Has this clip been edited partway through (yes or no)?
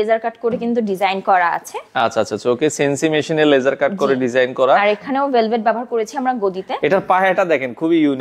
no